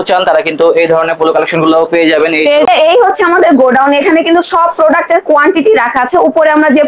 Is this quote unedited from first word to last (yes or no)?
no